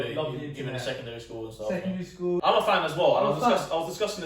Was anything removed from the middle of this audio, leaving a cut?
yes; 1 cut; at 2.4 s

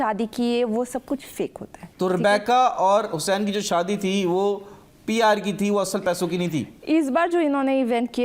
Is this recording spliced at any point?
no; 0 cuts

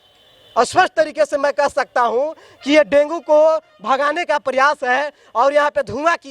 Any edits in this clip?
no; 0 cuts

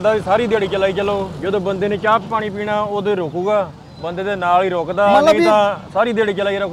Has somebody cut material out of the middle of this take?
no; 0 cuts

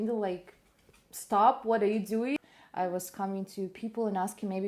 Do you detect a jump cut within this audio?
yes; 1 cut; at 2.4 s

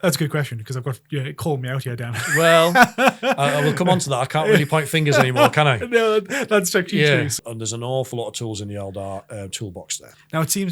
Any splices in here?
yes; 1 cut; at 7.3 s

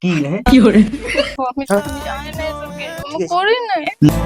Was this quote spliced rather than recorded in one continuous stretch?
yes; 1 cut; at 1.4 s

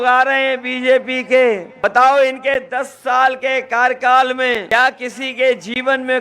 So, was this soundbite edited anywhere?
yes; 2 cuts; at 1.7 s, 4.7 s

